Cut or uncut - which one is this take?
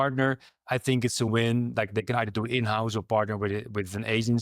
cut